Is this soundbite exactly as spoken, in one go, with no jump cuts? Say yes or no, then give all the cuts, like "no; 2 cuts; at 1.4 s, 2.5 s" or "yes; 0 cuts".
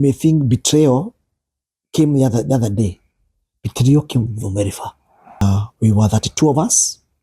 no; 1 cut; at 5.4 s